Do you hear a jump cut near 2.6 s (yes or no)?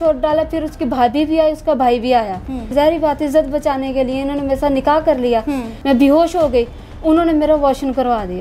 yes